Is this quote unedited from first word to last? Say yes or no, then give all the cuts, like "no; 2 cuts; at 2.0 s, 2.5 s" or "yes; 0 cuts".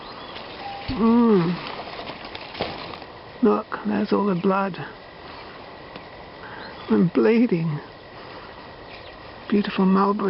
no; 1 cut; at 3.0 s